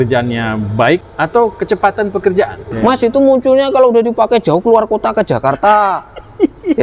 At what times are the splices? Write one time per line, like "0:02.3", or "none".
0:01.1
0:02.6